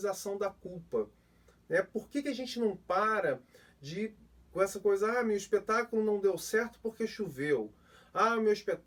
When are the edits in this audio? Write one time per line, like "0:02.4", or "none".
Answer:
none